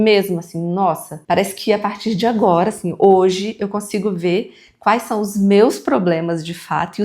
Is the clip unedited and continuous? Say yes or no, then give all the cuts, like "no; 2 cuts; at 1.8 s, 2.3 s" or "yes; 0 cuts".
no; 1 cut; at 1.1 s